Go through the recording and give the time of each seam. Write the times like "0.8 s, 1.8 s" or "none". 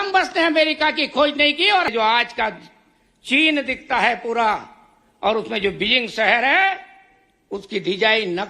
1.9 s

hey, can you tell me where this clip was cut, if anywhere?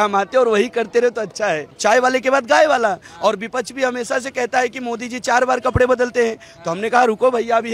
1.7 s

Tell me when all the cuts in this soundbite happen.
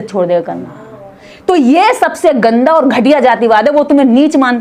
none

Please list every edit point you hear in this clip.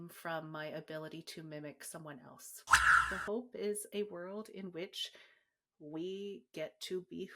2.9 s

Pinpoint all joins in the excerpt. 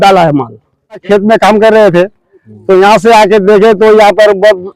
1.0 s

